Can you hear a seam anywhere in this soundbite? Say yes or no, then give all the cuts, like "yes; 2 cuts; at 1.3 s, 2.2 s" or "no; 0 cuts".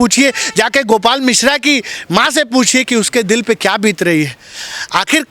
no; 0 cuts